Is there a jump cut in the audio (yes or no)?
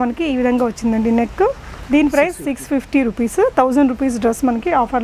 no